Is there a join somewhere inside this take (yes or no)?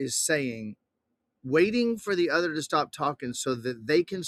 no